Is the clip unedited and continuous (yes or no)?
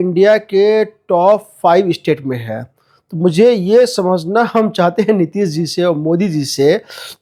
yes